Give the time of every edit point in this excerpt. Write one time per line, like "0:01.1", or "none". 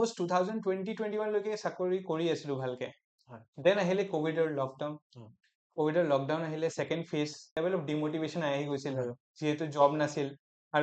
0:07.4